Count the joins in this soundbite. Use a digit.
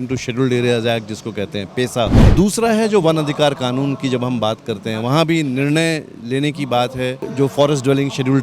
2